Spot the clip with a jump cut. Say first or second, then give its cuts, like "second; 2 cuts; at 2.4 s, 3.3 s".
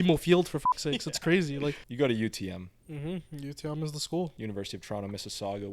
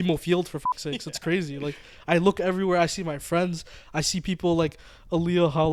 first; 2 cuts; at 1.8 s, 4.4 s